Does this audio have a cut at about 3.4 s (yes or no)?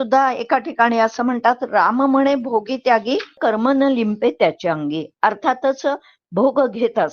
yes